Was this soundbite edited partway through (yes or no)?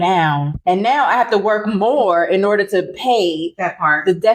no